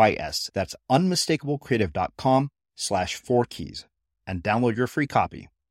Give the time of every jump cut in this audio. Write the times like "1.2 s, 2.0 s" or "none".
none